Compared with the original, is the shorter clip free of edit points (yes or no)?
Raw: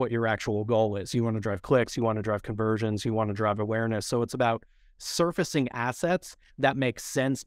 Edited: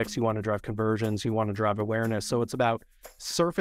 yes